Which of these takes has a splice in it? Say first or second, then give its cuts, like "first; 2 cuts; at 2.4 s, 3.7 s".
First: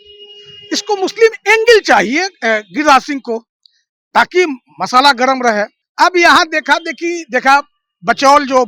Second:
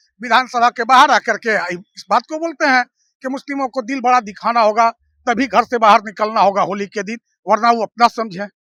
first; 1 cut; at 5.8 s